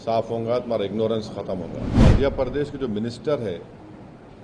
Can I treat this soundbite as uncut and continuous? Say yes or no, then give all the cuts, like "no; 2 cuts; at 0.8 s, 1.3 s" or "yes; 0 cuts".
no; 1 cut; at 2.0 s